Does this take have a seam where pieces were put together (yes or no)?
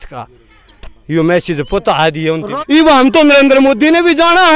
yes